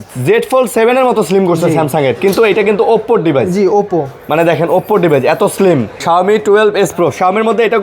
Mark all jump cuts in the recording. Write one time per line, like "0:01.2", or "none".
0:05.9